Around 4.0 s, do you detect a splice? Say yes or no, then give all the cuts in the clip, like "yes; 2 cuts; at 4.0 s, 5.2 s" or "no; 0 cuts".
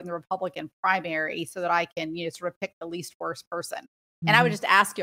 yes; 1 cut; at 4.0 s